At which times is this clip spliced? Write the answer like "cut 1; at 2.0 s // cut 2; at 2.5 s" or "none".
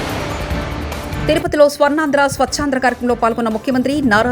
cut 1; at 1.2 s